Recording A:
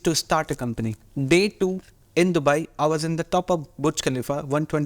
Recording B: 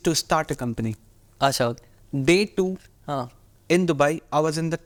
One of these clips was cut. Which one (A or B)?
A